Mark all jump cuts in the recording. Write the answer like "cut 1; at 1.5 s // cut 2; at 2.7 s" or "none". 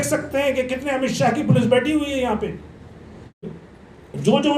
cut 1; at 3.5 s

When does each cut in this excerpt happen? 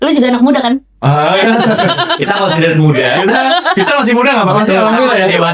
none

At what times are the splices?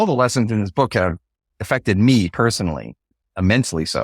cut 1; at 3.1 s

